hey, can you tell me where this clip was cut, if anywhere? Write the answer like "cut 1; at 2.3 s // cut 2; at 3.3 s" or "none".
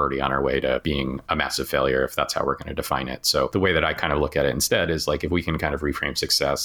cut 1; at 0.8 s // cut 2; at 3.5 s